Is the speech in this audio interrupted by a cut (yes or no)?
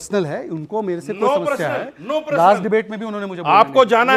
no